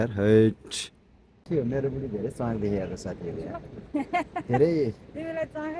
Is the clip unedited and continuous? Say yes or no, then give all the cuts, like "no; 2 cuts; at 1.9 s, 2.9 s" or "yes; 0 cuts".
no; 1 cut; at 1.3 s